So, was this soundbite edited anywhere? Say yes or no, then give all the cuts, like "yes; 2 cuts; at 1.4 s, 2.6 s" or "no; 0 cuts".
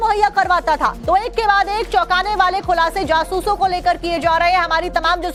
no; 0 cuts